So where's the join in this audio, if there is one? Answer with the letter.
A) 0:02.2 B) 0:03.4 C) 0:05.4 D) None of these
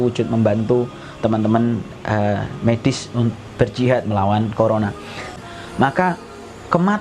C